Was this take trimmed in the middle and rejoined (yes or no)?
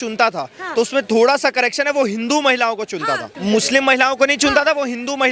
yes